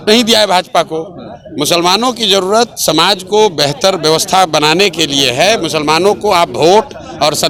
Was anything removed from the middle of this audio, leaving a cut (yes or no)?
no